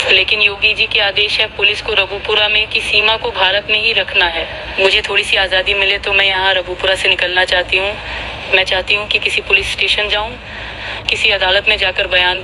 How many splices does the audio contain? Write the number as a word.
one